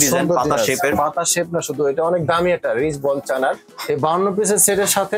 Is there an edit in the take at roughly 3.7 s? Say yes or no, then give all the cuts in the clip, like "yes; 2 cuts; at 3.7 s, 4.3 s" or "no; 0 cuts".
yes; 1 cut; at 3.7 s